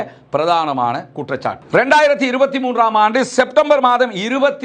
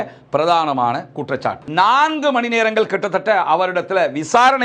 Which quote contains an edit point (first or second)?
second